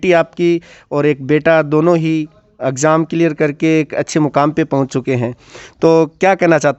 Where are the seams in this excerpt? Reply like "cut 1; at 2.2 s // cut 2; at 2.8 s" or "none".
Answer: none